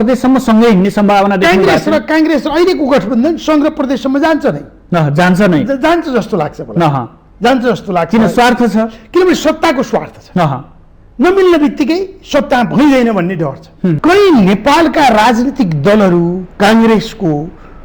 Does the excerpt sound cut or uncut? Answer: cut